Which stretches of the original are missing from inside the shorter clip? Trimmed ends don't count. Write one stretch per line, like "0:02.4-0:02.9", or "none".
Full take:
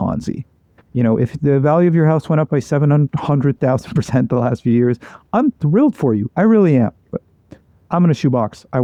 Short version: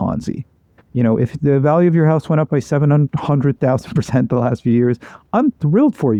none